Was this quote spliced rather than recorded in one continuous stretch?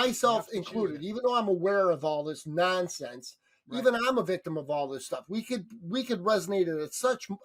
no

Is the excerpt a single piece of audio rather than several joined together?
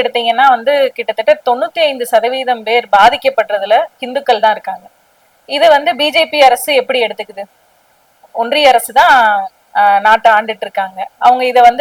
yes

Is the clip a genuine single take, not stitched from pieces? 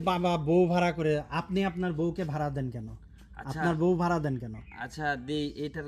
yes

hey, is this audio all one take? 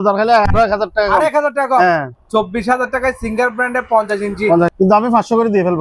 no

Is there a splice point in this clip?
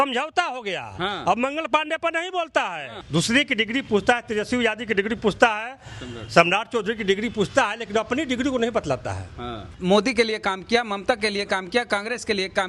yes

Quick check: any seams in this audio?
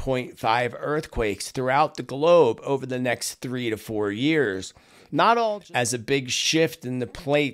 yes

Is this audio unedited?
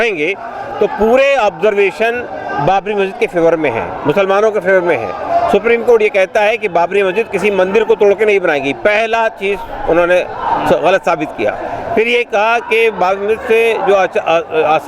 yes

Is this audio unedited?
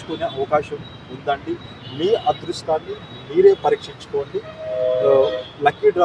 yes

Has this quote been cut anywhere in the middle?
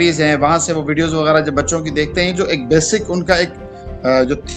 no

